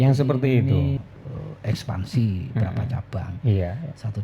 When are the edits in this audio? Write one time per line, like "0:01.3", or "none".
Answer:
0:01.0